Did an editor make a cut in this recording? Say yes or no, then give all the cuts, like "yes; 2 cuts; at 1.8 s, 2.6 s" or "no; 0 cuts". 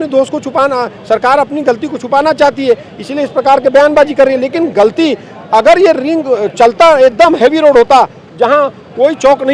no; 0 cuts